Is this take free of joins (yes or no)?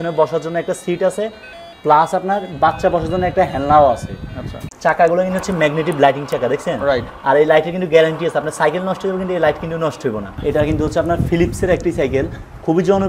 no